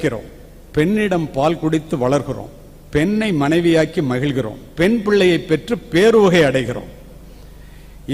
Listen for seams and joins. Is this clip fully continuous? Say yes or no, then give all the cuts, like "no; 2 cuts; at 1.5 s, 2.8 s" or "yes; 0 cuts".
yes; 0 cuts